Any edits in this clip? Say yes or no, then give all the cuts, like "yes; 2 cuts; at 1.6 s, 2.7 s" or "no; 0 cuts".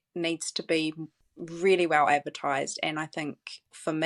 no; 0 cuts